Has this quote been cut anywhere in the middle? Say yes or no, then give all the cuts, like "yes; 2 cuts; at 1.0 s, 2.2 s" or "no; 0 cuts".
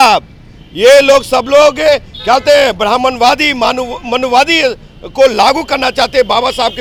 no; 0 cuts